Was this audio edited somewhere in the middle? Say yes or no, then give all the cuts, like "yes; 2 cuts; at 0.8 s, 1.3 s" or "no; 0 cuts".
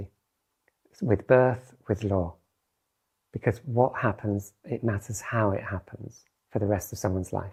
no; 0 cuts